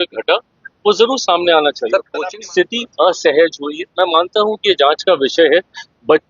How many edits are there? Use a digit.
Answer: 1